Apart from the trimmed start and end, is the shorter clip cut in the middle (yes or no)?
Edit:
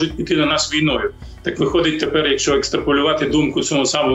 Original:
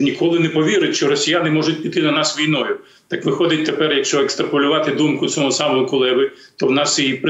no